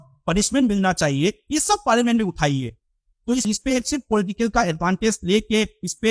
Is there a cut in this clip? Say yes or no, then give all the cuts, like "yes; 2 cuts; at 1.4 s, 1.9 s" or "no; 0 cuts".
yes; 1 cut; at 3.4 s